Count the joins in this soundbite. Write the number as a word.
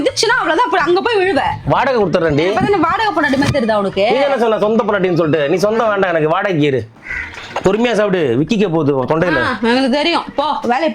one